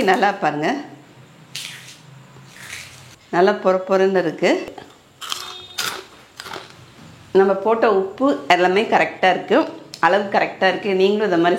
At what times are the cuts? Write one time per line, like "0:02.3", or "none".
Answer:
0:03.2
0:07.0

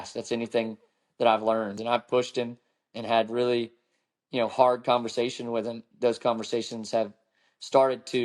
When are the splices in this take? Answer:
0:01.8
0:05.8

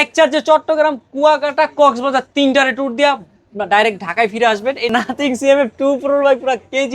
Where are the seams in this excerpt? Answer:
0:04.9

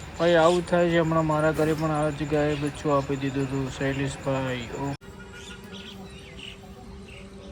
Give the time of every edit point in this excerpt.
0:05.1

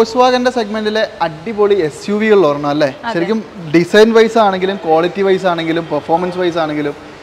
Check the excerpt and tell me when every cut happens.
none

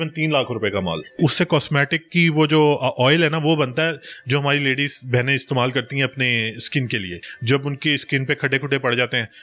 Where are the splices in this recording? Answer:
0:01.2
0:07.3

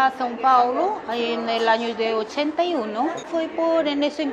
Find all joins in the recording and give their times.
0:03.3

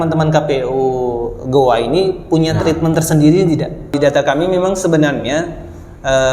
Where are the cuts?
0:03.9

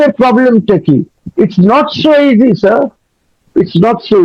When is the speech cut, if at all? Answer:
0:01.2

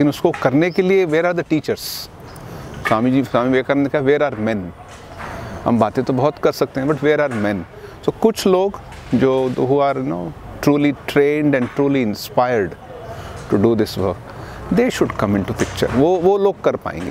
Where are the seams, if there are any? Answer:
none

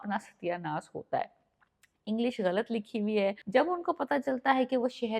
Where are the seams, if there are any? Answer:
0:03.4

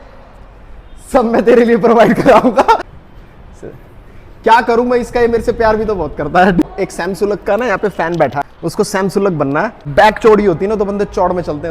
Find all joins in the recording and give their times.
0:02.9
0:06.6
0:08.5
0:09.9

